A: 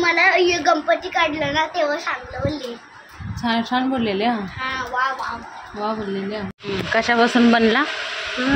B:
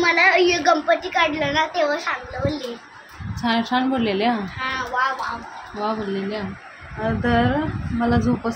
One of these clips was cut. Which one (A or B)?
A